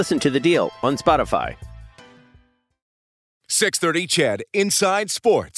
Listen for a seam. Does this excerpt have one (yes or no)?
yes